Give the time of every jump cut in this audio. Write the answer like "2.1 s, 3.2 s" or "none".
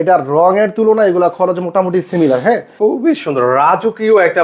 2.7 s